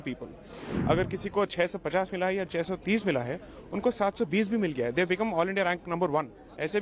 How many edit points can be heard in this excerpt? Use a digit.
0